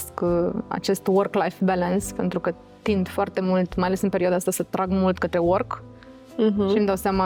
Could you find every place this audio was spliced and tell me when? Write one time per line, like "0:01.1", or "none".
none

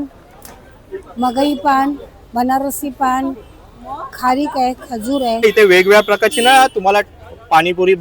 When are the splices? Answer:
0:05.4

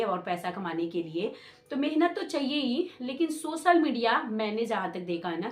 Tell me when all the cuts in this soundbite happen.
none

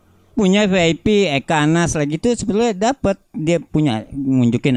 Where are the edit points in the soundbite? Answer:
none

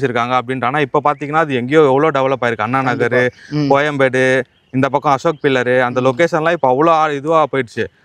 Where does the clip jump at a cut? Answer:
none

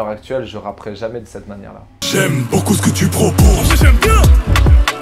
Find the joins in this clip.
0:02.0

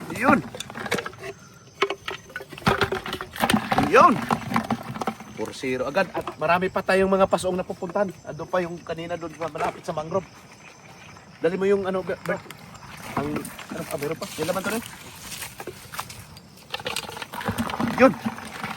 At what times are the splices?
none

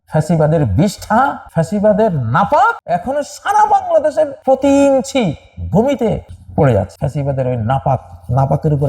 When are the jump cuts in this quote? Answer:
0:01.4
0:02.8
0:04.4
0:06.4
0:06.9

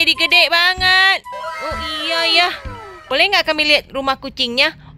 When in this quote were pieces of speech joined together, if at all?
0:02.9

